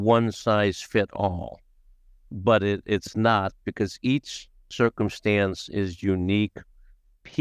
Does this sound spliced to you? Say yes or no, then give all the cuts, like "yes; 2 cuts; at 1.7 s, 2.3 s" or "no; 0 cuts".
no; 0 cuts